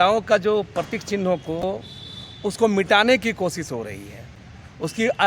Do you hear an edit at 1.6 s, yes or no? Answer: yes